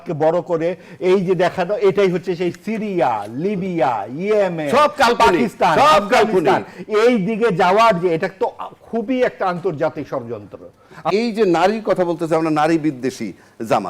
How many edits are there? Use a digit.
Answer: 1